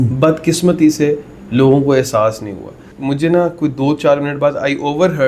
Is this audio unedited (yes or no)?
no